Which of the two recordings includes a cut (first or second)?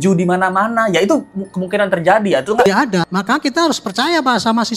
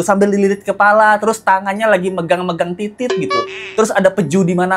first